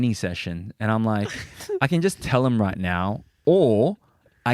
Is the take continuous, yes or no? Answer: no